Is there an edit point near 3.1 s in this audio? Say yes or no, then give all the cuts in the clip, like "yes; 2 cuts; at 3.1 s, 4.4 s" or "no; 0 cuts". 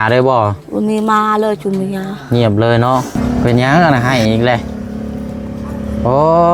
yes; 1 cut; at 3.1 s